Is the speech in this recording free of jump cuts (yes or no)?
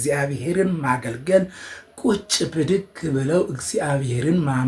yes